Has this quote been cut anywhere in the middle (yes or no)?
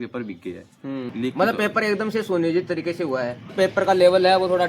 yes